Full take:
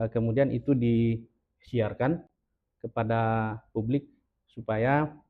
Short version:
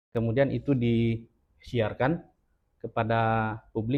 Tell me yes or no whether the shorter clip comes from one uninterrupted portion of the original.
yes